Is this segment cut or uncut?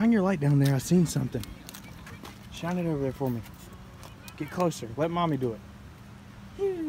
uncut